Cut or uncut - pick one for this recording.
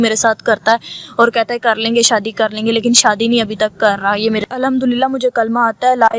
cut